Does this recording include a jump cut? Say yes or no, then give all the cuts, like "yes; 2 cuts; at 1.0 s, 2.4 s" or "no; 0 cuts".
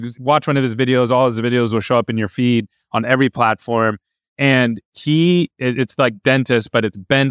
no; 0 cuts